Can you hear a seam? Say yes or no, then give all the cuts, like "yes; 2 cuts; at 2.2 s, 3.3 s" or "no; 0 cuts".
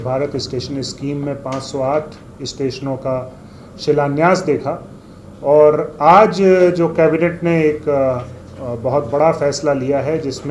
no; 0 cuts